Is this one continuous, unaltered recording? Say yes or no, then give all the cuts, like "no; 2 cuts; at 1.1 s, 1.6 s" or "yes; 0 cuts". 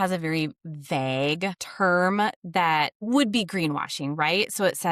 no; 2 cuts; at 1.6 s, 3.0 s